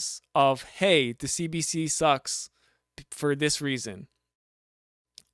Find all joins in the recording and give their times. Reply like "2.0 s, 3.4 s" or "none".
none